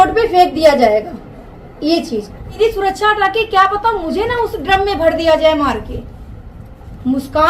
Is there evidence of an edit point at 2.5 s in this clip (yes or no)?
yes